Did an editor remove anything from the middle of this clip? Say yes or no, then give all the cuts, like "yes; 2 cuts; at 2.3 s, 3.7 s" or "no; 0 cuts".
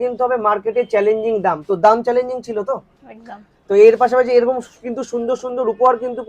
no; 0 cuts